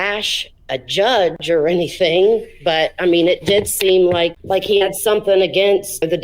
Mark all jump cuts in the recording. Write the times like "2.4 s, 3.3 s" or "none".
4.4 s